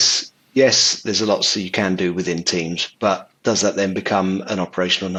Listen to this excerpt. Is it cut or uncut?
uncut